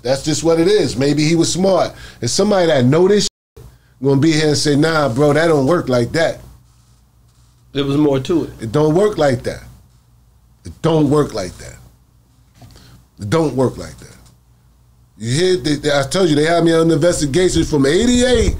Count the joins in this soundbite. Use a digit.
0